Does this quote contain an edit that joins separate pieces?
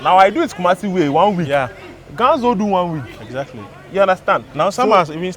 no; 0 cuts

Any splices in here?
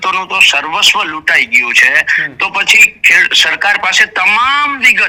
no; 0 cuts

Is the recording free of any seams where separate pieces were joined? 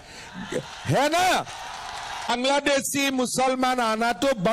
no; 1 cut; at 2.3 s

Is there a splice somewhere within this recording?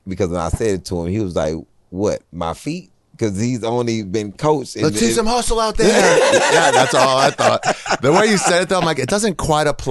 no; 0 cuts

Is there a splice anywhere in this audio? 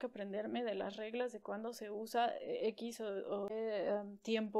yes; 2 cuts; at 1.1 s, 3.5 s

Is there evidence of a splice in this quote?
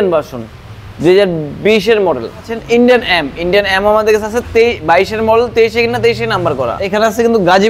yes; 2 cuts; at 2.6 s, 6.8 s

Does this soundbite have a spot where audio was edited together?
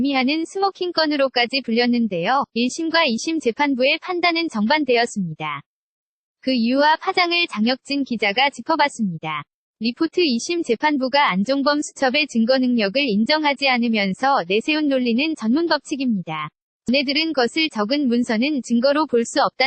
yes; 1 cut; at 16.9 s

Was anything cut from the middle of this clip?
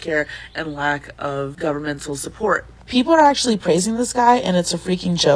no; 0 cuts

